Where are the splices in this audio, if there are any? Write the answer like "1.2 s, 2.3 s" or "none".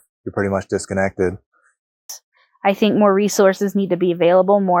2.0 s